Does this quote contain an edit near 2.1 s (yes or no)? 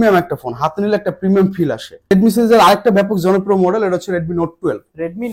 yes